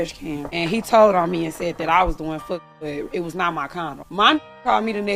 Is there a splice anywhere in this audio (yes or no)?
no